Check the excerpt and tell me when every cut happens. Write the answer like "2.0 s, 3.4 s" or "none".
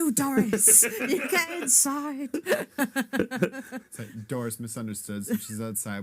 none